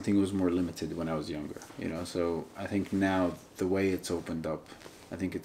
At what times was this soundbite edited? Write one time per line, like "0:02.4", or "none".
0:01.7